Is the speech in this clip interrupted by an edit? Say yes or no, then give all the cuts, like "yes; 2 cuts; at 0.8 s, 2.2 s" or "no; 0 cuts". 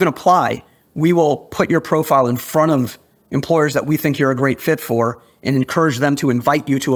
no; 0 cuts